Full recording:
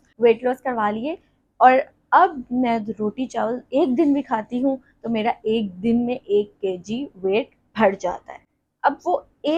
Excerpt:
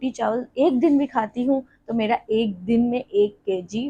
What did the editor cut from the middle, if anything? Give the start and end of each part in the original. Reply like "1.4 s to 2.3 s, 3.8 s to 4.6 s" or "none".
none